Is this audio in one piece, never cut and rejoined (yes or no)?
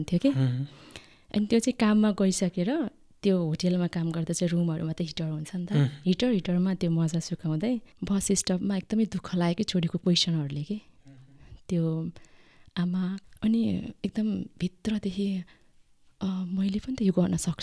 no